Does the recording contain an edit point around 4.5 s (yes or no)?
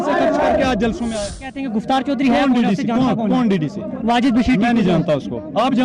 no